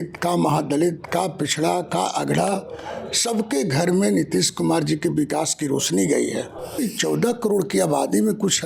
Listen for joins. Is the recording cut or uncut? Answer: cut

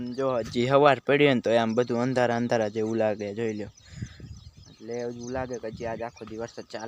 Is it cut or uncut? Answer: uncut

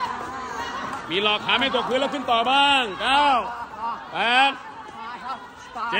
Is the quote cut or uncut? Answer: uncut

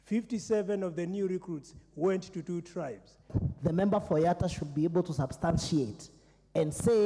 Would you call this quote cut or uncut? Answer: cut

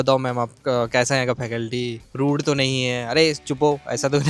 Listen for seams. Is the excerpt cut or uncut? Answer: cut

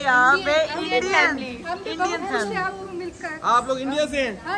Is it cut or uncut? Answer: uncut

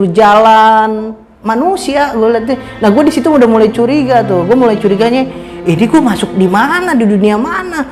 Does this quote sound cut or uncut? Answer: cut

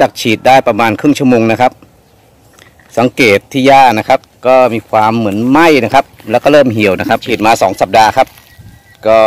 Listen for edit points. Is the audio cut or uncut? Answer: cut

